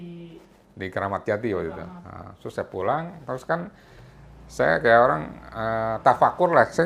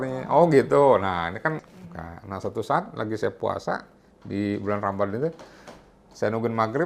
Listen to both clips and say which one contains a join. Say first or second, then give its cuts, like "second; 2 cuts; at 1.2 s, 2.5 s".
second; 1 cut; at 1.6 s